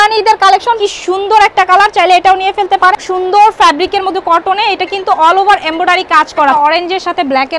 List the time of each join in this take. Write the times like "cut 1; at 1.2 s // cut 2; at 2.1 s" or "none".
cut 1; at 0.8 s // cut 2; at 2.9 s // cut 3; at 6.5 s